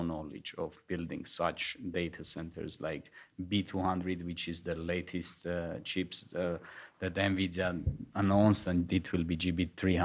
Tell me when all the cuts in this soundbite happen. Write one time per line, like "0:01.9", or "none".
none